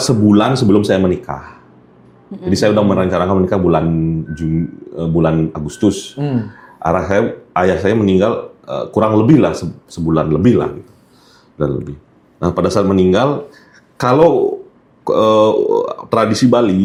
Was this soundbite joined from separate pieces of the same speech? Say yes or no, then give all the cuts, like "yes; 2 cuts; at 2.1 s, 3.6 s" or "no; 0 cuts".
no; 0 cuts